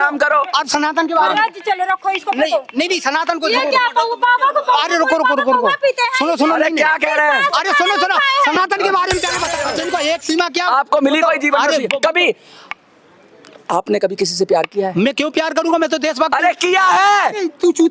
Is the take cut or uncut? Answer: cut